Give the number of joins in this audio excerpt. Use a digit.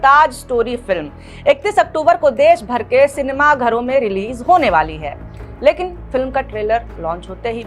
0